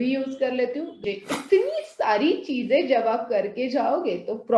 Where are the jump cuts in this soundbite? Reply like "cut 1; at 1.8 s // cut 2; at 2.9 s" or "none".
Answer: cut 1; at 1.0 s